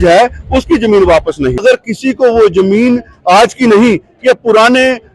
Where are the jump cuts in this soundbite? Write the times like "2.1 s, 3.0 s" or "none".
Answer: 1.6 s